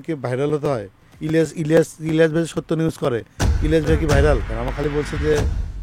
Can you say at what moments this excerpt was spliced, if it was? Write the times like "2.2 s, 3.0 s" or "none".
4.5 s